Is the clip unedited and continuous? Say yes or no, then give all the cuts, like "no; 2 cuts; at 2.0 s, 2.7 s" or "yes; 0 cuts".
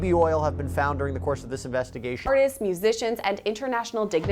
no; 1 cut; at 2.3 s